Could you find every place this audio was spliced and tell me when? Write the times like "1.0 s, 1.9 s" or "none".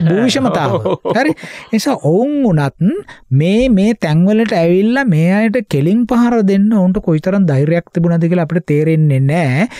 none